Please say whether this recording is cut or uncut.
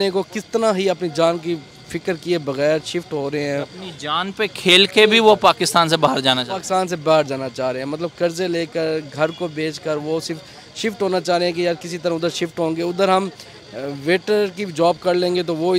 uncut